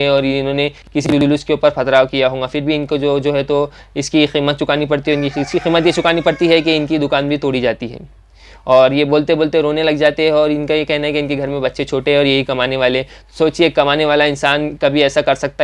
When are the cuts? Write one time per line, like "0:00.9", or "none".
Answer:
none